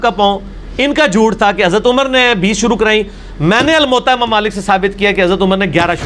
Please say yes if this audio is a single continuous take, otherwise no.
yes